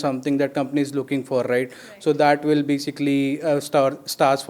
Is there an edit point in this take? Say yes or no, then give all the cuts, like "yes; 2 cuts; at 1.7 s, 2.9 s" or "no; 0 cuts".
no; 0 cuts